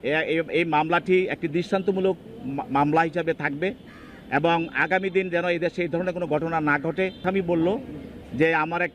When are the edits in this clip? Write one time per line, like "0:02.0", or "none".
0:07.2